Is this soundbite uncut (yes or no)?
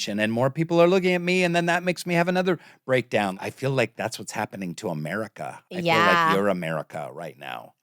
no